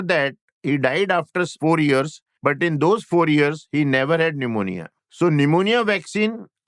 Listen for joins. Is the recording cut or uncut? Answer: cut